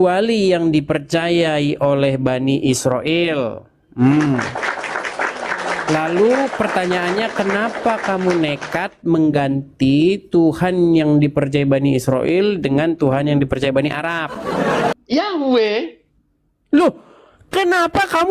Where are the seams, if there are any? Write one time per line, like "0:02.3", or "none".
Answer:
0:14.9